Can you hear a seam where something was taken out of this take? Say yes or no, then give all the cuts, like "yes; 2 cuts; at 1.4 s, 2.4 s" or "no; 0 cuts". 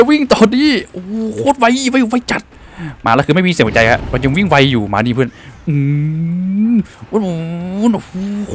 no; 0 cuts